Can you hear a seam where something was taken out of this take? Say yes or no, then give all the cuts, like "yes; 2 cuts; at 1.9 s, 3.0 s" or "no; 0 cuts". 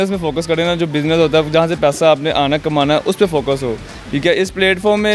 no; 0 cuts